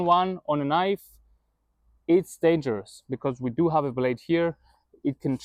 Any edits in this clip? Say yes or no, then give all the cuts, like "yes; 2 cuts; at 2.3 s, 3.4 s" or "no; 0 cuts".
no; 0 cuts